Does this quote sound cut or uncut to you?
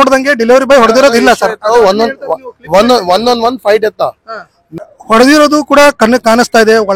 cut